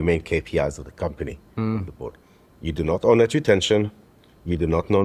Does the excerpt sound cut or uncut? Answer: uncut